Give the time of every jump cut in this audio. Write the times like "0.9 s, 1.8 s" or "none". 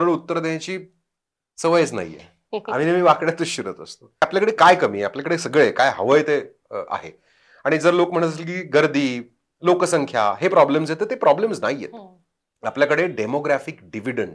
4.2 s